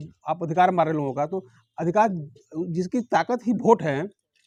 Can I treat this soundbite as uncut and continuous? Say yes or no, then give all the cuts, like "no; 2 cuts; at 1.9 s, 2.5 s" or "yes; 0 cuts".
yes; 0 cuts